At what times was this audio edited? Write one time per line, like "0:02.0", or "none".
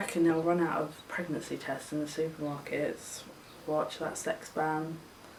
none